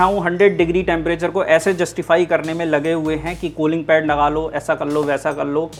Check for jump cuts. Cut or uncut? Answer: uncut